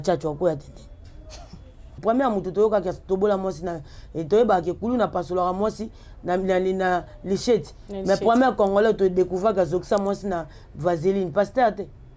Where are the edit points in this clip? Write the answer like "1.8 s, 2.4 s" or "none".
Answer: 2.0 s